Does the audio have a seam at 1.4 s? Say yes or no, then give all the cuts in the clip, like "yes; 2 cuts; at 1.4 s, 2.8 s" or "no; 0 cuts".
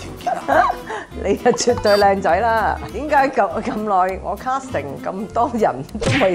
no; 1 cut; at 2.9 s